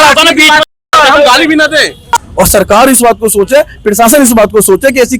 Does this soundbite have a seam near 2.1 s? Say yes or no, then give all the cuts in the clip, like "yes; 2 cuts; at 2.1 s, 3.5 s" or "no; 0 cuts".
yes; 1 cut; at 2.1 s